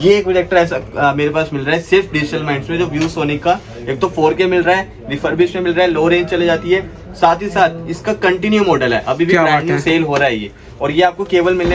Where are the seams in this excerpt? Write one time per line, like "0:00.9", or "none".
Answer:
none